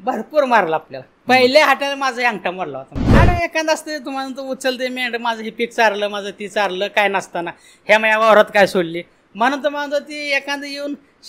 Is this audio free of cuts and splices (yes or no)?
no